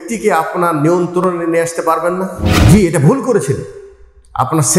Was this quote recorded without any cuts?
no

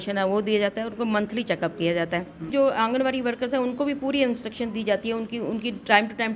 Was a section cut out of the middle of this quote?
yes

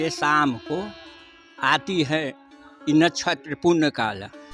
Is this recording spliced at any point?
no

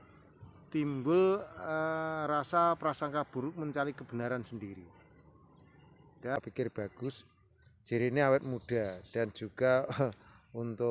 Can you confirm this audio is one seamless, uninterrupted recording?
no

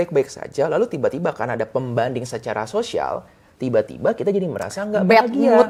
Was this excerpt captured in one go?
yes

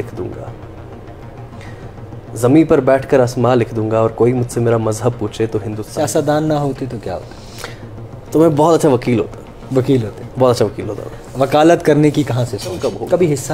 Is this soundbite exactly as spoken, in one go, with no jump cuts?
no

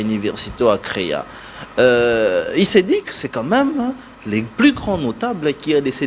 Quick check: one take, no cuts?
yes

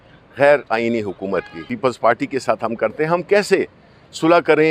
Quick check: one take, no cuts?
no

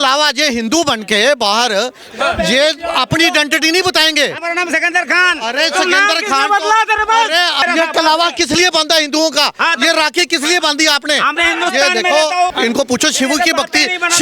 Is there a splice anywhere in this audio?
yes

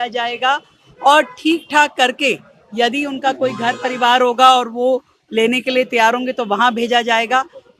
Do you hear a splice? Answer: no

